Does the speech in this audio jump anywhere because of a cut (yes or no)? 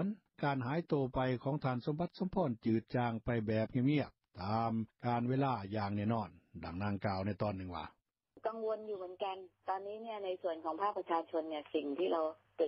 yes